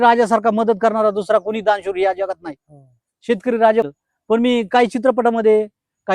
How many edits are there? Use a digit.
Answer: 1